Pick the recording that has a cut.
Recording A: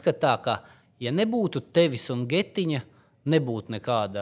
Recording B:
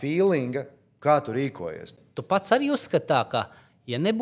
B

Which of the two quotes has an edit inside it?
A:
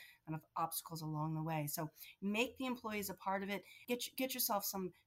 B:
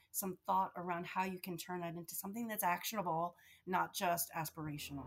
A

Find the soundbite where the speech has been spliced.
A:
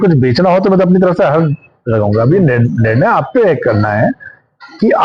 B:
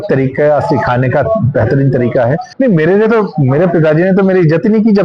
B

